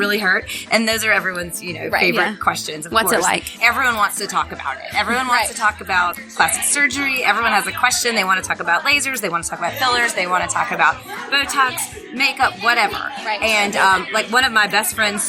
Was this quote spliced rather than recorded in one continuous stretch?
yes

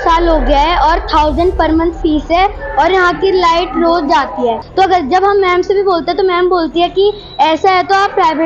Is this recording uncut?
no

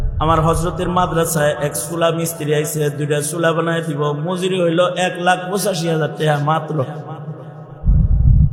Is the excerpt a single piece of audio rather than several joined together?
yes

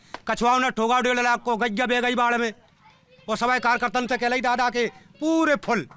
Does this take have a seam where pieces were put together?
no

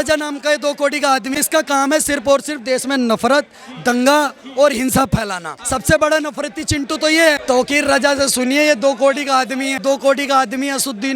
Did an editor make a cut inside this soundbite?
yes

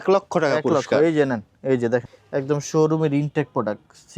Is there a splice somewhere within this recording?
yes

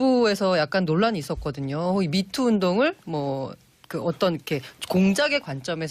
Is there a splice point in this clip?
yes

